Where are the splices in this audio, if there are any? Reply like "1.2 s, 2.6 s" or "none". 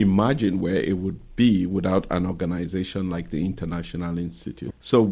none